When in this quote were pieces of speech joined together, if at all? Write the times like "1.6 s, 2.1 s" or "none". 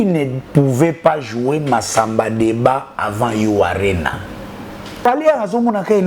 4.9 s